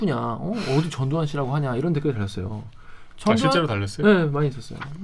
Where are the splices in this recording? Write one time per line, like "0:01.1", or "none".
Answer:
none